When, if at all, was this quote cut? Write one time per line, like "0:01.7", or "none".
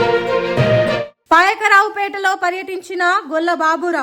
0:01.1